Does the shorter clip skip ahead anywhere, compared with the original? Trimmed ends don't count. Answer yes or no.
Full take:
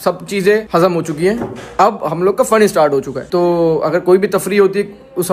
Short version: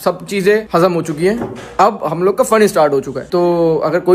no